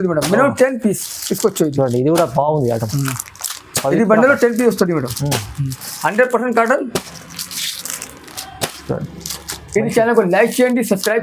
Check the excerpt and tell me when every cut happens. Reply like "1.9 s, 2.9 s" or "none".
none